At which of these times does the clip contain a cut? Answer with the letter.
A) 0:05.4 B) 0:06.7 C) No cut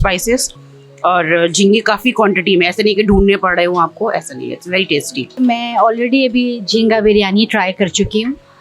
A